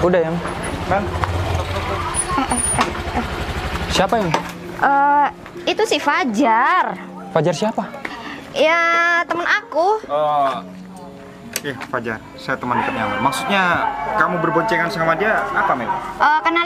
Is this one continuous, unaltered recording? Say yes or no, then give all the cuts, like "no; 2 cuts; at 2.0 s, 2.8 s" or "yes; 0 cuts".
yes; 0 cuts